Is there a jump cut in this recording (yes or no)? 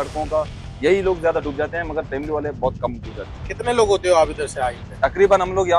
yes